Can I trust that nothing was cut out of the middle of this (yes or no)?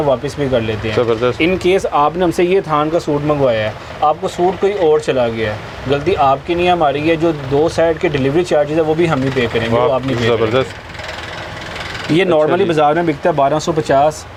yes